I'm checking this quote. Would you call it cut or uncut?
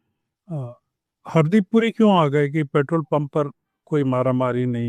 uncut